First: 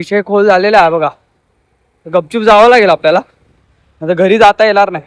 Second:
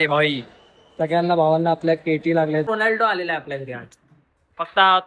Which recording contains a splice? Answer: second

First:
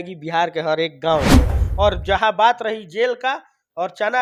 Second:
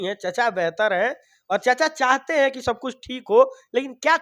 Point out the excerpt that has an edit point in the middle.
first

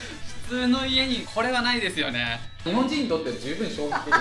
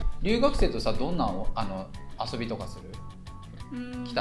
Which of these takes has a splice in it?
first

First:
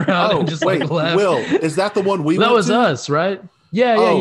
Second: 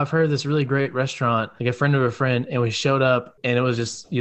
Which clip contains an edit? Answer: second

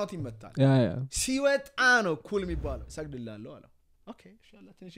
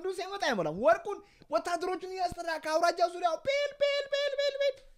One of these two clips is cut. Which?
first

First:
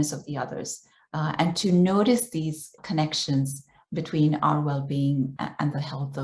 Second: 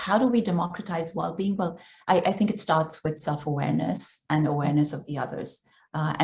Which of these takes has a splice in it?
first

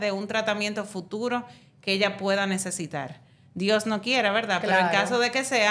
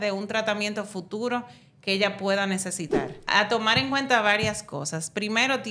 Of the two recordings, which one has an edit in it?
second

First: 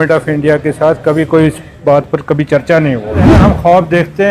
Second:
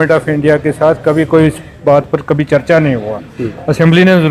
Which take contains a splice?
first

